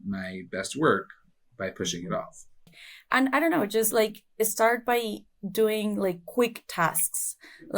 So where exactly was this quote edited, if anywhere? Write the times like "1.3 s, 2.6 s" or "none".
2.8 s